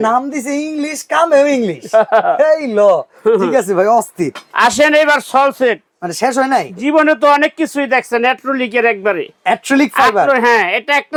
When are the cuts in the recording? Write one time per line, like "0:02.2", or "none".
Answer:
none

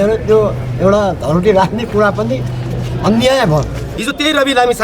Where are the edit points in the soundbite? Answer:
0:03.9

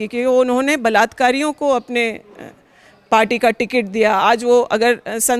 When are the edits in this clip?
none

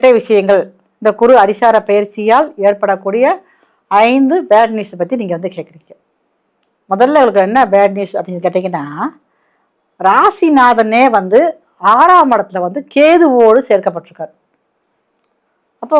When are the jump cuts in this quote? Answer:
none

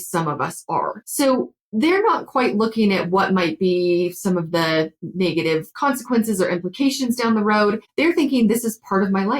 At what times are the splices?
0:01.0
0:07.9

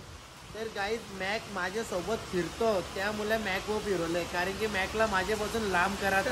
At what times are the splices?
none

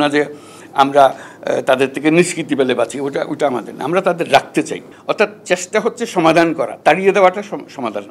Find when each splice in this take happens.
0:04.8

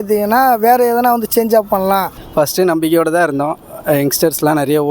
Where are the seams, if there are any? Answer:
0:02.2

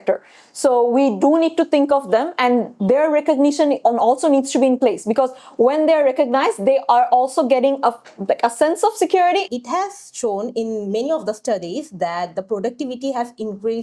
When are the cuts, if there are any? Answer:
0:09.5

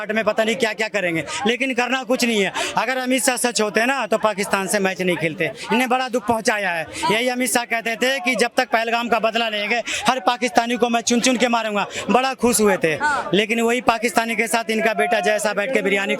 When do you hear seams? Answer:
none

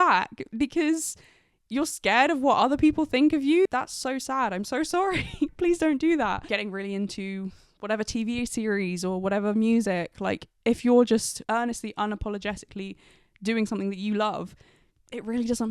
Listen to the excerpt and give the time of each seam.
0:03.7
0:05.5
0:06.5

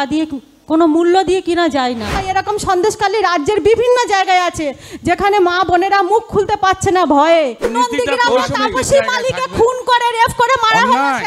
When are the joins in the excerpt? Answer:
0:02.2
0:07.7

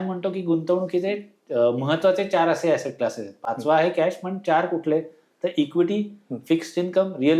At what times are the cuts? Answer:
none

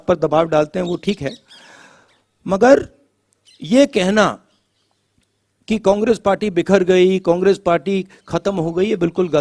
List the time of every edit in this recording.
none

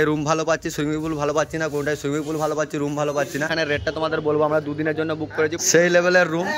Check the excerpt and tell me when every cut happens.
0:03.5
0:05.6

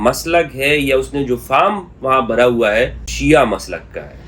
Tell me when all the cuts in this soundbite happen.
0:03.1

